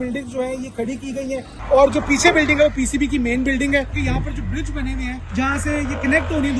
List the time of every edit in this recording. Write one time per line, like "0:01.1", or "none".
0:01.5
0:03.9
0:05.2